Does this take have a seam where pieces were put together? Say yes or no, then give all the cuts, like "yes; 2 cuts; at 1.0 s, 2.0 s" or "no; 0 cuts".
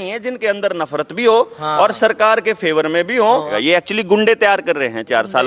yes; 1 cut; at 3.5 s